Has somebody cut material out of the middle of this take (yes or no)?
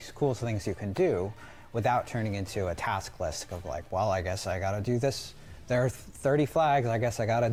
no